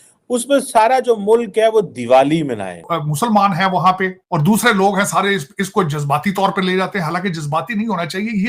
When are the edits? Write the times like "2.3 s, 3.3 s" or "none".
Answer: 2.9 s, 4.2 s